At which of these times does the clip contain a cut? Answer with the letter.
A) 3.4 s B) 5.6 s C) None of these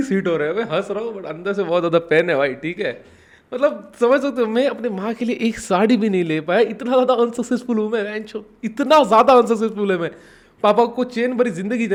C